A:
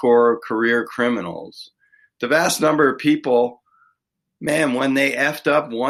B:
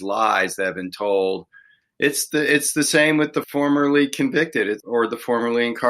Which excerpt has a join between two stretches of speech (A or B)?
B